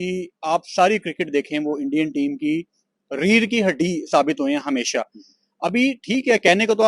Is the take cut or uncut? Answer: uncut